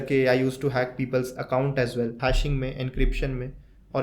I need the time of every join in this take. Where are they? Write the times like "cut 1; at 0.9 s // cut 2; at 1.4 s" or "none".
cut 1; at 2.2 s